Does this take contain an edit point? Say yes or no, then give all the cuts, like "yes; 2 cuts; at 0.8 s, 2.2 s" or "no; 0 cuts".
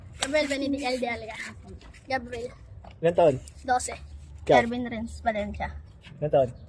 no; 0 cuts